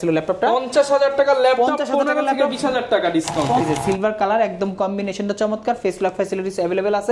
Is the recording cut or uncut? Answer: cut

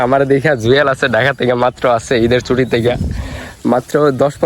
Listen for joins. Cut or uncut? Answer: uncut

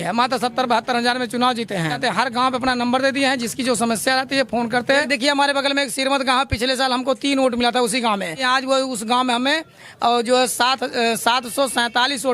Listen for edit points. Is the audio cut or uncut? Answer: cut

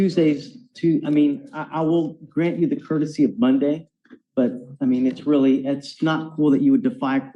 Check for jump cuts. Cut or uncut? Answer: uncut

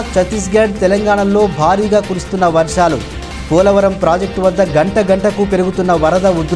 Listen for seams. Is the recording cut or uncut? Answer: uncut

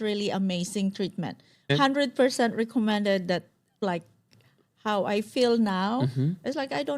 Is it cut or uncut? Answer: cut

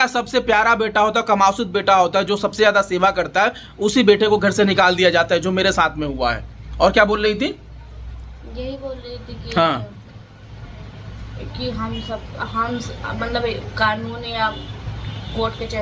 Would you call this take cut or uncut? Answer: uncut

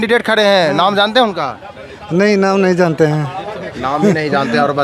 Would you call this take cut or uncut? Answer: uncut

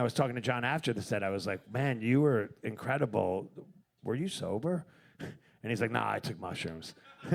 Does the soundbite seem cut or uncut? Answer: uncut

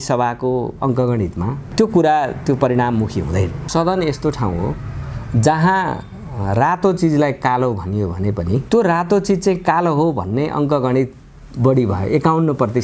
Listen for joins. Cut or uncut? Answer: cut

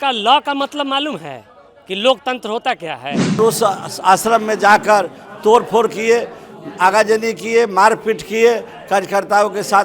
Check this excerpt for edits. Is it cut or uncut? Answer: cut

